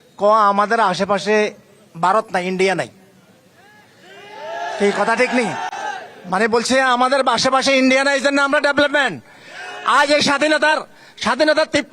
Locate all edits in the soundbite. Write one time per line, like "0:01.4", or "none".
none